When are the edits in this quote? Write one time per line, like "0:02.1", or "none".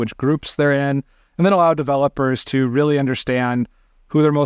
none